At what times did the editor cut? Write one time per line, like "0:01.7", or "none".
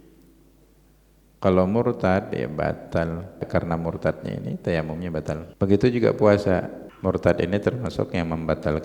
0:03.5
0:05.5
0:06.8